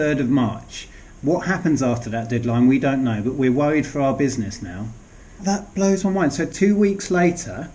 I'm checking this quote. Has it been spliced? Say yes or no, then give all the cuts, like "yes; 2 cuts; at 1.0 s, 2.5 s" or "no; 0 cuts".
yes; 1 cut; at 5.4 s